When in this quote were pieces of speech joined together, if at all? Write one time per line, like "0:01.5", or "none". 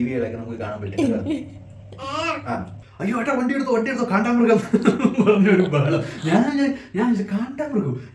0:02.8